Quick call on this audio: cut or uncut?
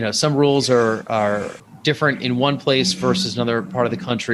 uncut